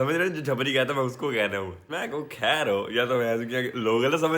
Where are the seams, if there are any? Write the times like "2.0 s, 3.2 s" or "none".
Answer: 1.9 s